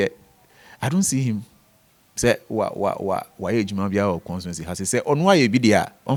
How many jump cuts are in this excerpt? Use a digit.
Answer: 0